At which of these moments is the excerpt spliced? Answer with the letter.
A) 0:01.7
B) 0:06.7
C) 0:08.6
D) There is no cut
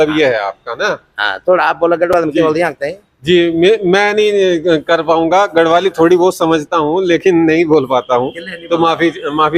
D